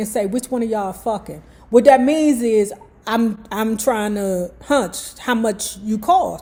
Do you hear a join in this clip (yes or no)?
no